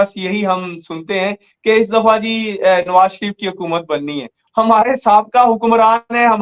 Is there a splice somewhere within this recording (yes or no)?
yes